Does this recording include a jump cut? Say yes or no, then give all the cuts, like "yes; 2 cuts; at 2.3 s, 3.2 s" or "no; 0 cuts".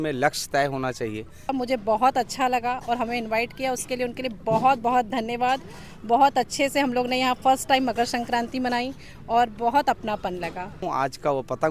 yes; 2 cuts; at 1.5 s, 10.9 s